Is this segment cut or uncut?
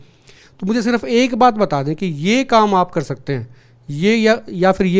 uncut